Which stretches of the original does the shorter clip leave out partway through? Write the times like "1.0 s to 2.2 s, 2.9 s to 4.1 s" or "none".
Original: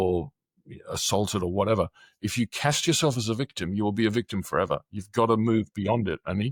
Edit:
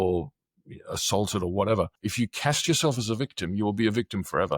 2.0 s to 2.2 s